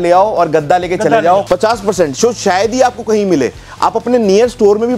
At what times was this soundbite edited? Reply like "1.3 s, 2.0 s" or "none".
1.4 s